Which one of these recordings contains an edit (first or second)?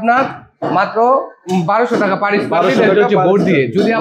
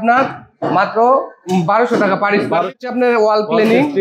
second